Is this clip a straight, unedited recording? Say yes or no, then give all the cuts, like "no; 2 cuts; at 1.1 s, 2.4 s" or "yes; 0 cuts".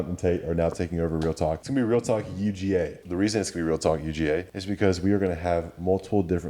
no; 3 cuts; at 1.6 s, 3.0 s, 4.6 s